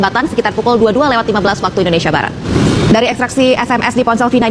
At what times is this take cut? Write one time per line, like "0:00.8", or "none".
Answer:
0:02.5